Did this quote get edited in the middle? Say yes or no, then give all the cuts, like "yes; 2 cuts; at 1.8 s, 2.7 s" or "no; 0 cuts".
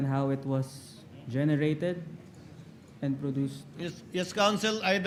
no; 0 cuts